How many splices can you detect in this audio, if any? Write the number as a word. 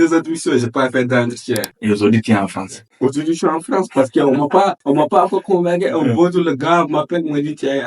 one